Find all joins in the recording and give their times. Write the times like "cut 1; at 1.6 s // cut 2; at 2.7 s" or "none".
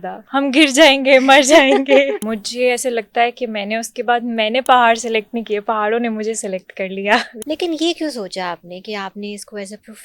cut 1; at 2.2 s // cut 2; at 7.3 s